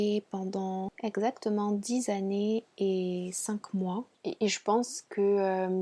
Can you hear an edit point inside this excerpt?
yes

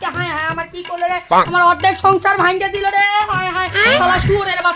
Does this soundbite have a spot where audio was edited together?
no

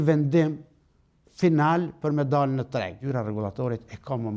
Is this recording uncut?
no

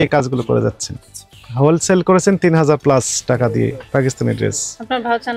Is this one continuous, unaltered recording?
yes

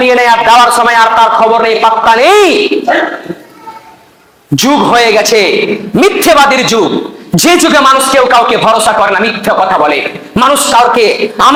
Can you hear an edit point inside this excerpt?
no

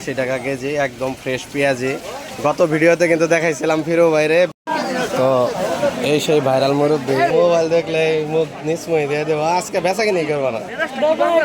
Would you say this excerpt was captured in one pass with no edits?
no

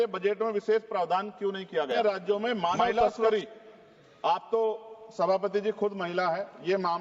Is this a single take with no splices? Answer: no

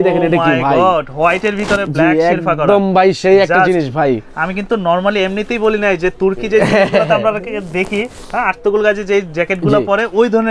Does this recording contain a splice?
no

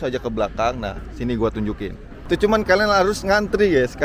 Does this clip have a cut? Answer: yes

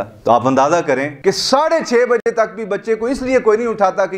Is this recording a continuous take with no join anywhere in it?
no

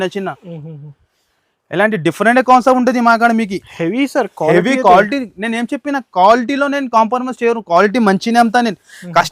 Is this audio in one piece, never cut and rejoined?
yes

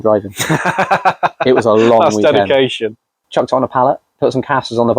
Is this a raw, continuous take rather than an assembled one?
no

